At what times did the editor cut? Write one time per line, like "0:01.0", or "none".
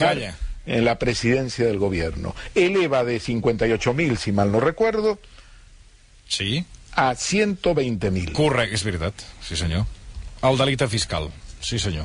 0:05.1